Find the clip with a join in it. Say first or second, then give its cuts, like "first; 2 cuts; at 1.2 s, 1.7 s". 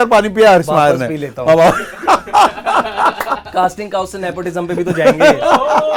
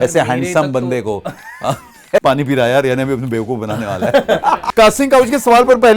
second; 2 cuts; at 2.2 s, 4.6 s